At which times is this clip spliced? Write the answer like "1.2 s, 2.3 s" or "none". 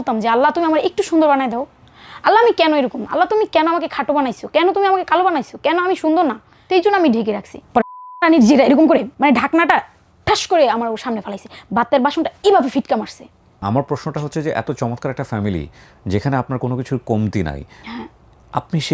6.5 s, 13.6 s